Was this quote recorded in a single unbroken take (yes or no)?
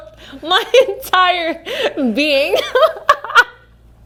yes